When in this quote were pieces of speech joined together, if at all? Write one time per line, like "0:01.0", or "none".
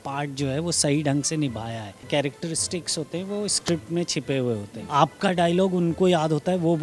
0:01.9
0:04.7